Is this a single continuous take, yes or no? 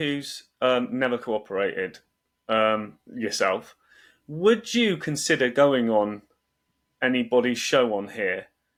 yes